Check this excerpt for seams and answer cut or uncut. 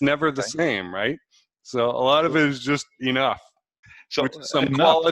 cut